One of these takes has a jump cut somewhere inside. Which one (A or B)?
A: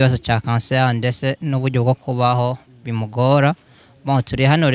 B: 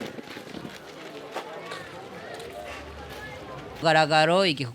B